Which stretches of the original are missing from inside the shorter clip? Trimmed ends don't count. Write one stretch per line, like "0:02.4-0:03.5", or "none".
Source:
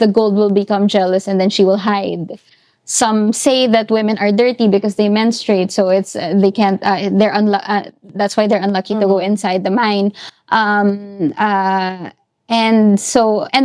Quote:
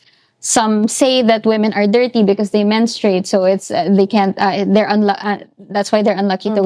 none